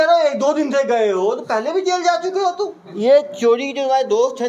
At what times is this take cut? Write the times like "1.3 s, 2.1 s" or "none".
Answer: 2.8 s